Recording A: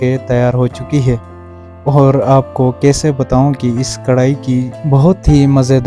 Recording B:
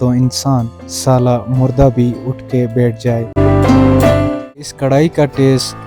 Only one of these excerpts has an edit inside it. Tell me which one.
B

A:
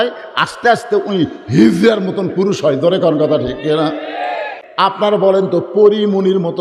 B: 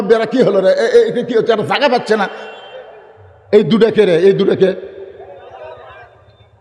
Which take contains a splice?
A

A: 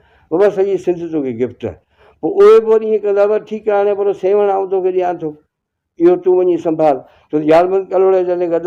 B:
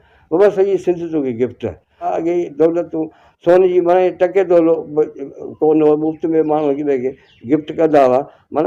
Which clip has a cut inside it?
B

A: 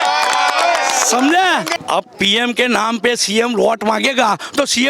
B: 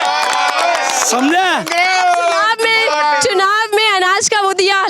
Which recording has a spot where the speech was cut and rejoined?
A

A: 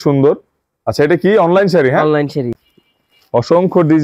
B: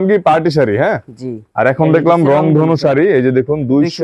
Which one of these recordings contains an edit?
A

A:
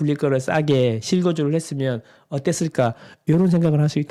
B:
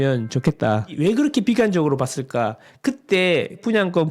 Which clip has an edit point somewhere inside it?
B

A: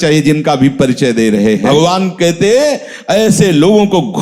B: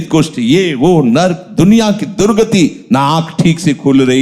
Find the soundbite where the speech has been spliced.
A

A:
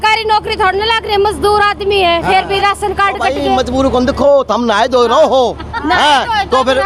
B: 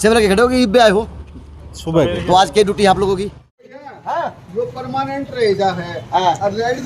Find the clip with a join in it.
B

